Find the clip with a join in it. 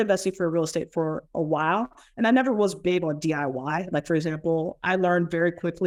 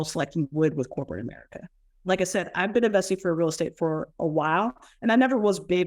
second; 1 cut; at 1.8 s

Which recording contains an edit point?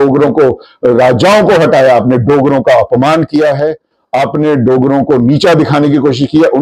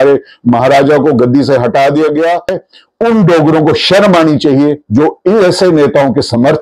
second; 1 cut; at 2.6 s

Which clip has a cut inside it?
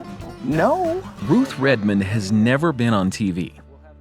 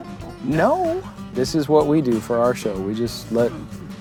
first; 1 cut; at 1.1 s

